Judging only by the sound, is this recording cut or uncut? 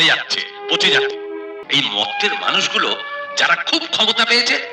cut